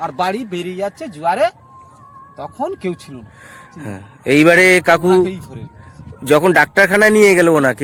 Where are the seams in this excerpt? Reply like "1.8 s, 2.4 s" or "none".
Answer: none